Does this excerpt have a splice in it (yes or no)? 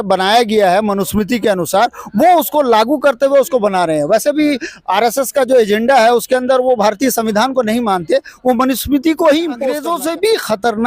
yes